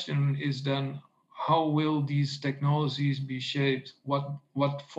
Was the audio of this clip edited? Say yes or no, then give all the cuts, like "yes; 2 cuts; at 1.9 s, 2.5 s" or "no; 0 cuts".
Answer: no; 0 cuts